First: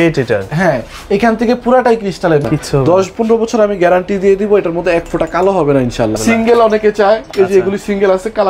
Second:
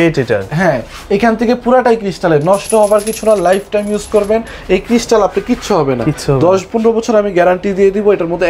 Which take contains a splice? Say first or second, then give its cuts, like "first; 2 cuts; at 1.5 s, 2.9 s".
first; 2 cuts; at 2.4 s, 6.2 s